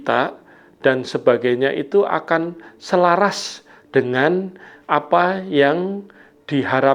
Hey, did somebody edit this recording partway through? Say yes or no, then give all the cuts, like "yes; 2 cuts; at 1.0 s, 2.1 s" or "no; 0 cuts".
no; 0 cuts